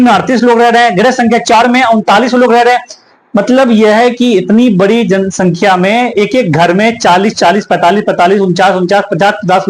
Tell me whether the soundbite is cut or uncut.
uncut